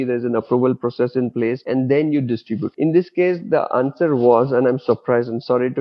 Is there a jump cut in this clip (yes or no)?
yes